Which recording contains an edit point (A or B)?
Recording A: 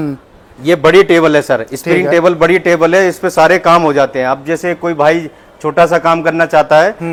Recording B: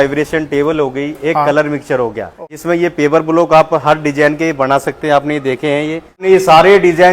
B